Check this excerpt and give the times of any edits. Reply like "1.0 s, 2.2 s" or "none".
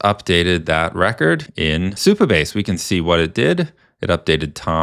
1.7 s